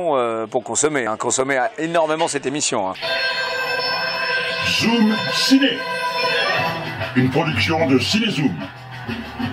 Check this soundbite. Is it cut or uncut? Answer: cut